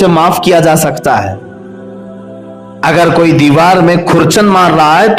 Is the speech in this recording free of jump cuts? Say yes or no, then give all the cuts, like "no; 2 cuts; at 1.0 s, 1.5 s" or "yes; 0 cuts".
no; 2 cuts; at 1.4 s, 2.8 s